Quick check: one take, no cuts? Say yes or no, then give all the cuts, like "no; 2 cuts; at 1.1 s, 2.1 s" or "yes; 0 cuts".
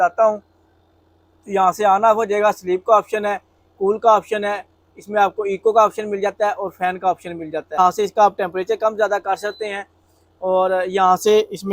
no; 1 cut; at 7.8 s